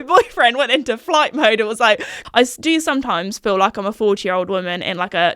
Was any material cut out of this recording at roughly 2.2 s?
yes; 1 cut; at 2.2 s

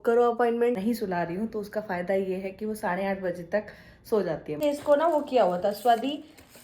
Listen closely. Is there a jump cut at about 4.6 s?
yes; 2 cuts; at 0.8 s, 4.6 s

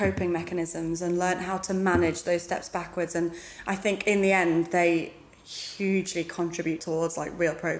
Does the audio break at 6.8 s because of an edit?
yes; 1 cut; at 6.8 s

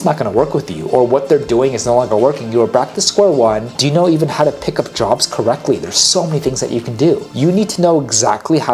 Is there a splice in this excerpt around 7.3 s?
yes; 2 cuts; at 3.7 s, 7.3 s

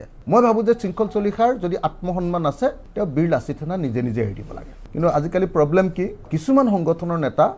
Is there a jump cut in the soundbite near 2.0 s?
no; 2 cuts; at 4.8 s, 6.3 s

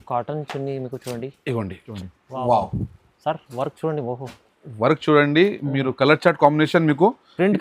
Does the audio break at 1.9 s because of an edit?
yes; 1 cut; at 1.9 s

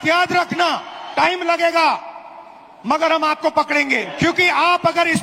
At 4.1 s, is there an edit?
yes; 2 cuts; at 0.9 s, 4.1 s

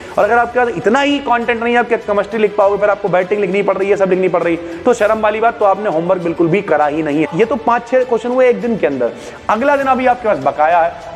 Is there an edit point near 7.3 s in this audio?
yes; 1 cut; at 7.3 s

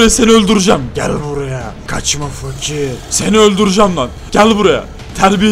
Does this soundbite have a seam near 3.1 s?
yes; 3 cuts; at 1.8 s, 3.1 s, 4.2 s

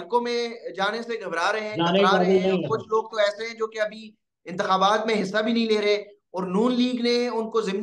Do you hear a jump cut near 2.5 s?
no; 0 cuts

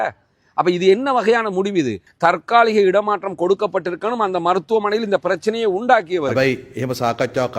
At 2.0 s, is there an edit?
yes; 2 cuts; at 2.0 s, 6.3 s

